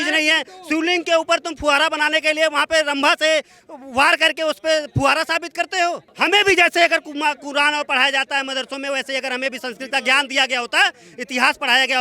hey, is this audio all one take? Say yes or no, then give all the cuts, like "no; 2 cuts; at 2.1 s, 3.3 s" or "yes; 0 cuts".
no; 1 cut; at 6.1 s